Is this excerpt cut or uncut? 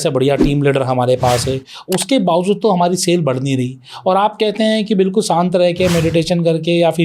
uncut